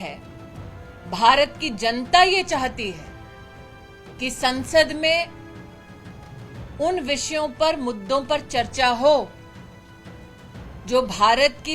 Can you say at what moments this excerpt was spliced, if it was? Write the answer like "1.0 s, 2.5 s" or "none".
5.4 s, 6.8 s